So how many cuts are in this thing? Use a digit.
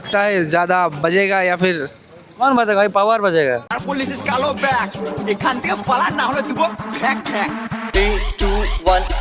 1